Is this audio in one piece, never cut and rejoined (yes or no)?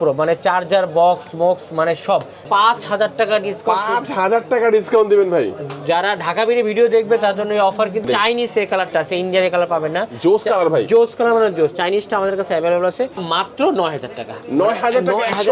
no